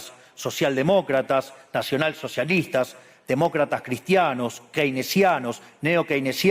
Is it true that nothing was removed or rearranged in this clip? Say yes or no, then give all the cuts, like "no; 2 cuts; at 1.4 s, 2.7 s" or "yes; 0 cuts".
yes; 0 cuts